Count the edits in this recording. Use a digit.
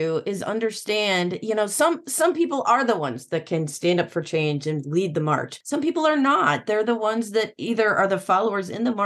1